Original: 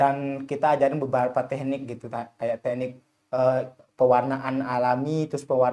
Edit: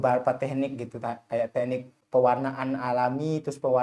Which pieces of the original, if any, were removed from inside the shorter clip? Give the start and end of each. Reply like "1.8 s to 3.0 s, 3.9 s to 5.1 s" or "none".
3.0 s to 3.8 s